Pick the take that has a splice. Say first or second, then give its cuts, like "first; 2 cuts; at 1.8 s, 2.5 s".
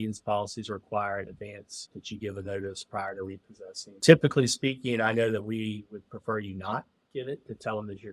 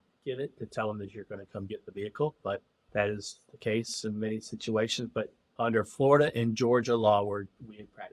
first; 2 cuts; at 1.8 s, 4.0 s